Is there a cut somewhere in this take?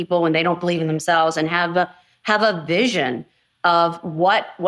no; 0 cuts

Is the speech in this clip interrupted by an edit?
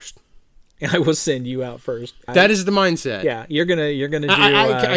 yes; 1 cut; at 2.2 s

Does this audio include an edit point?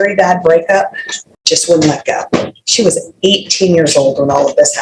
no; 0 cuts

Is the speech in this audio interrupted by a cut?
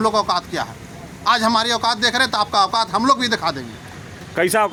no; 0 cuts

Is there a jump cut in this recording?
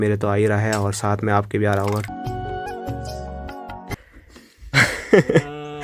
yes; 2 cuts; at 2.0 s, 3.9 s

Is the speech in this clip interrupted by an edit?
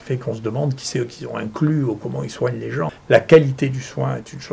yes; 1 cut; at 3.0 s

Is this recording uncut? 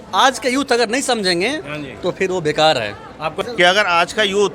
no; 1 cut; at 3.4 s

